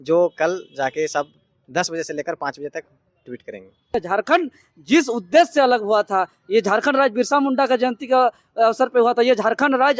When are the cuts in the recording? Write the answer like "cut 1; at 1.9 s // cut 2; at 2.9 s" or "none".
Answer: cut 1; at 3.9 s